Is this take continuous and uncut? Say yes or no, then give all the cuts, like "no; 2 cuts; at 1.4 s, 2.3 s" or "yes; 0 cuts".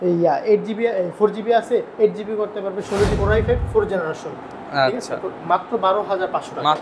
no; 1 cut; at 3.1 s